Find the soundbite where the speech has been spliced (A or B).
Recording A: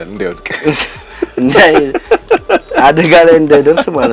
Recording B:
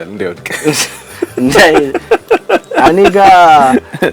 B